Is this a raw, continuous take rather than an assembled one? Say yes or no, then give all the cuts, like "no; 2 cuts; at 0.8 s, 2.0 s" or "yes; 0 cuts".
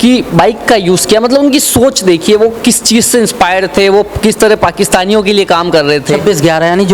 yes; 0 cuts